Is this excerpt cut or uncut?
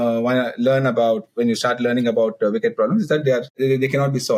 uncut